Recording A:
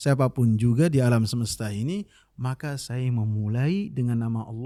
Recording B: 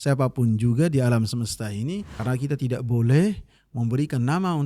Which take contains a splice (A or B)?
B